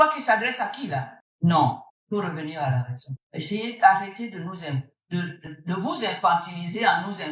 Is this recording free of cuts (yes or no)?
yes